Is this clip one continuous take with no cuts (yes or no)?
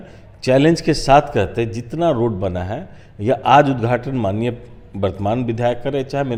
yes